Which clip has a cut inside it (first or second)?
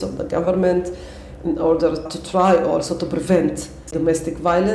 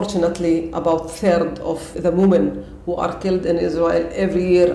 first